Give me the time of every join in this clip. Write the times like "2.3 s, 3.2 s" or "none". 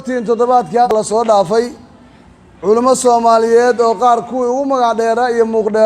0.9 s